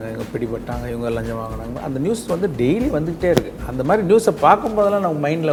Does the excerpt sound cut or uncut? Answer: uncut